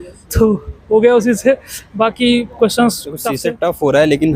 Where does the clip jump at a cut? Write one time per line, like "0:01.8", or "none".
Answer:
0:03.4